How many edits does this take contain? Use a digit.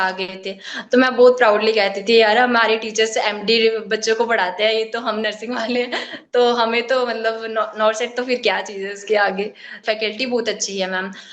1